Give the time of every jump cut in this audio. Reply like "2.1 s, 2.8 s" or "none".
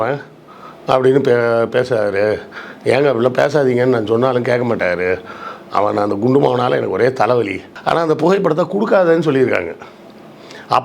7.7 s